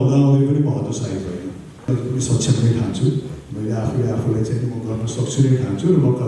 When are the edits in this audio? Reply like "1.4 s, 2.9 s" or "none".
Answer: 1.9 s